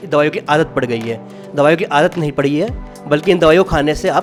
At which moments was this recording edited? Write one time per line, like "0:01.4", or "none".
none